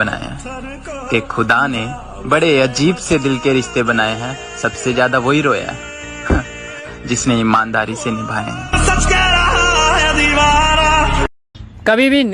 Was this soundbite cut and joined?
yes; 1 cut; at 11.4 s

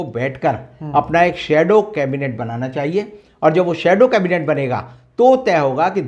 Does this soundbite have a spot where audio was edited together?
no; 0 cuts

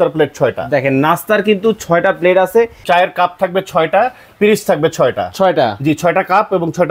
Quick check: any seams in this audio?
yes; 1 cut; at 2.8 s

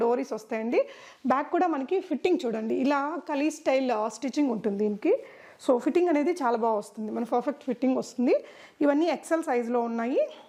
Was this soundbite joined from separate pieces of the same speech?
no; 0 cuts

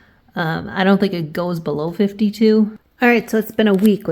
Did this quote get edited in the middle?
yes; 1 cut; at 2.8 s

